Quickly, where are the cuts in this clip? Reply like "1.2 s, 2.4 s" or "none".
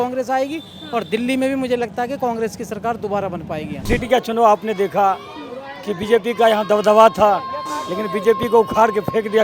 3.8 s